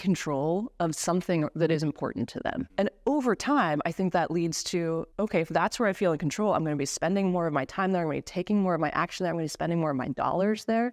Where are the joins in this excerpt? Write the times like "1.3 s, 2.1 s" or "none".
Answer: 2.6 s